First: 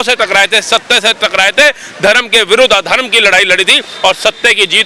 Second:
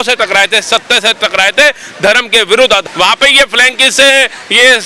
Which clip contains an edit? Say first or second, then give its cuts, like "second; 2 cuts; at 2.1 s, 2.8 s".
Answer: second; 1 cut; at 2.9 s